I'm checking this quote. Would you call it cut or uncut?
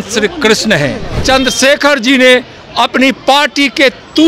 cut